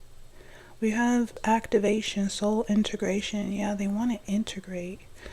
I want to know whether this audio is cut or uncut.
cut